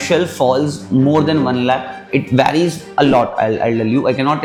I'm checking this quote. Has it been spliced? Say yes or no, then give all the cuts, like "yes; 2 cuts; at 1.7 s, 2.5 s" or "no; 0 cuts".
no; 0 cuts